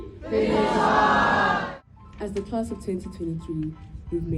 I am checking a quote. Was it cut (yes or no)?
yes